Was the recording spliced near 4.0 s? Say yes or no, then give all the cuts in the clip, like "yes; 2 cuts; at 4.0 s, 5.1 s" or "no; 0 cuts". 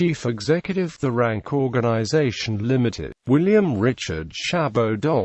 no; 1 cut; at 0.9 s